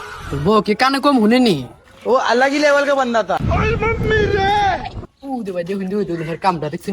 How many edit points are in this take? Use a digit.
1